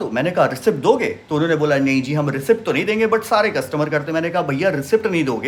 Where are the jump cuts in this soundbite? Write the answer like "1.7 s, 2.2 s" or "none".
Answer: none